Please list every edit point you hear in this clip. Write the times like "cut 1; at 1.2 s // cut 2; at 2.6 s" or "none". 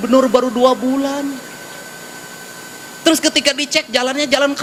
none